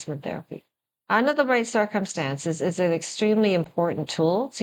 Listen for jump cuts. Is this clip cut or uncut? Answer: uncut